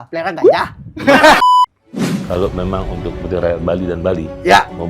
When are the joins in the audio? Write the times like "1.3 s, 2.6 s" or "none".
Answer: 1.4 s